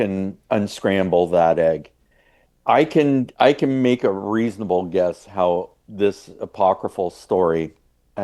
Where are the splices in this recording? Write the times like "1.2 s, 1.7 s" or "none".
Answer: none